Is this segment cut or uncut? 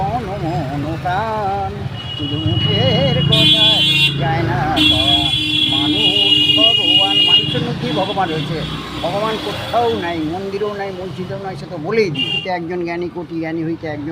cut